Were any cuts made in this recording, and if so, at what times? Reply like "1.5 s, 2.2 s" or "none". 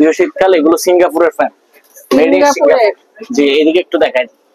none